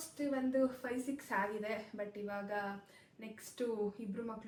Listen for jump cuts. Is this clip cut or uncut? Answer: uncut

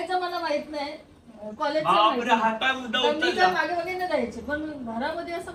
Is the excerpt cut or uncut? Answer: uncut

